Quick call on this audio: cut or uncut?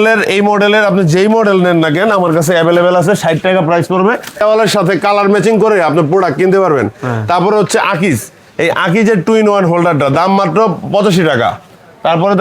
cut